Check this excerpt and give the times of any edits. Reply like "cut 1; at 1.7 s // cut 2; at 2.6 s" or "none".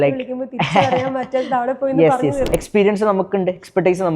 cut 1; at 2.4 s